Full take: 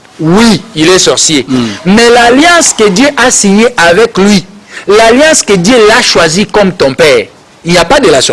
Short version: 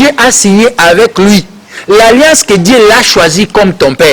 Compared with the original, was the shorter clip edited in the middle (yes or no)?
no